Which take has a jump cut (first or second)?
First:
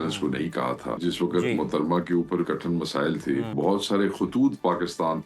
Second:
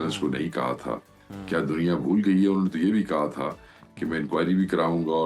first